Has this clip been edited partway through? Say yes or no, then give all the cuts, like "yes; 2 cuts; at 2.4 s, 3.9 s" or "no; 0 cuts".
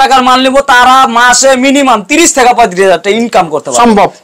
no; 0 cuts